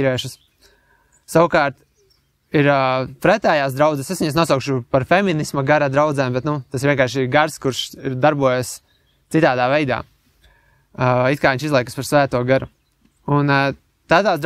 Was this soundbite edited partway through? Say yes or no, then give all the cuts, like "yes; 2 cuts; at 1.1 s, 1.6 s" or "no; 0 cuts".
no; 0 cuts